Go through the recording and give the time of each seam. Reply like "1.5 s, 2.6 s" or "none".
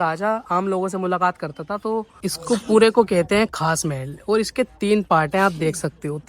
2.1 s

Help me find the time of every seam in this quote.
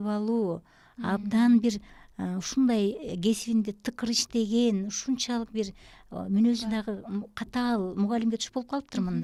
none

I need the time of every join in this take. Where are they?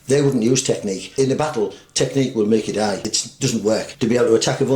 1.0 s, 3.2 s, 3.9 s

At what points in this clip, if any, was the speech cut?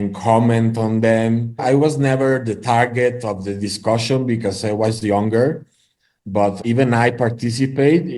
1.6 s

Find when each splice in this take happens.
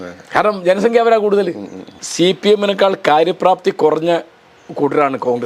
2.0 s

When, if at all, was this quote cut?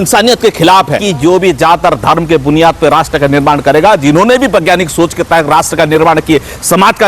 1.1 s

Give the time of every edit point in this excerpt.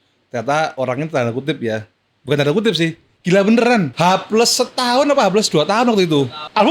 3.9 s

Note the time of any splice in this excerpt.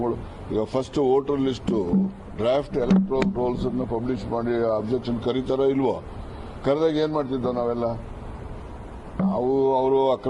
1.9 s

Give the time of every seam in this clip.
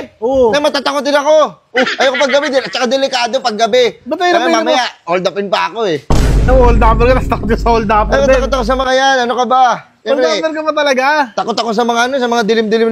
none

